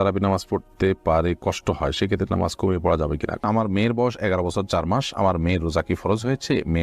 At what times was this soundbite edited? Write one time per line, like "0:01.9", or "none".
0:03.4